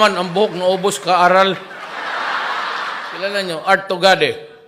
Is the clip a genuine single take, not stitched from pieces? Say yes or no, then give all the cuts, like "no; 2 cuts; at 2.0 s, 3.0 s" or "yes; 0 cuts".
no; 1 cut; at 3.0 s